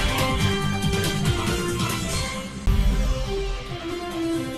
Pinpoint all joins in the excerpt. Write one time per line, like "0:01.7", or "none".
0:02.0